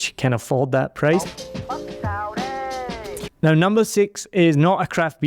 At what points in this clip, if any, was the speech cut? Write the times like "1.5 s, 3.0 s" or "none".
1.4 s, 3.3 s